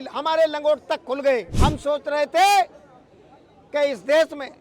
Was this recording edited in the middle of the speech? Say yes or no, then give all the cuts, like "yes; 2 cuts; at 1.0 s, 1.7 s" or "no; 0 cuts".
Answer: yes; 1 cut; at 1.5 s